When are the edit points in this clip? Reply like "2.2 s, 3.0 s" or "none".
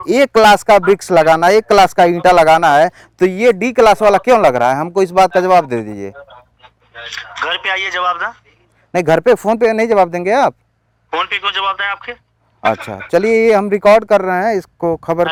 none